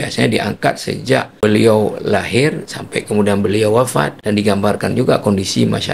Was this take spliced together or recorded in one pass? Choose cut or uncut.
cut